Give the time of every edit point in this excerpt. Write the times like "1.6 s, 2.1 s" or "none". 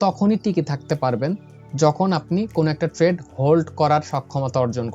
none